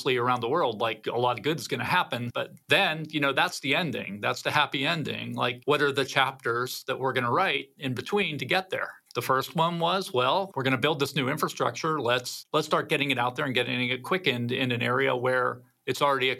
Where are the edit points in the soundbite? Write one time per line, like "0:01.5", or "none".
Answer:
0:02.3